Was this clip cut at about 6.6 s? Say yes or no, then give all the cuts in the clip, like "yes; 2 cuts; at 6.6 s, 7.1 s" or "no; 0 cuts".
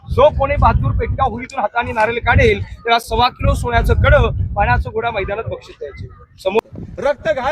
yes; 1 cut; at 6.6 s